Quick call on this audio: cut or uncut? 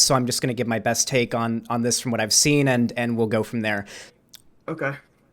cut